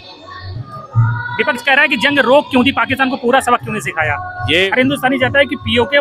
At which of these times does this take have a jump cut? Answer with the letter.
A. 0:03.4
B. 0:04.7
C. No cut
B